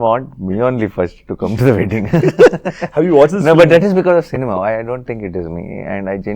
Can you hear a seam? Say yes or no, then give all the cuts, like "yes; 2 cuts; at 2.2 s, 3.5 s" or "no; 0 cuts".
no; 0 cuts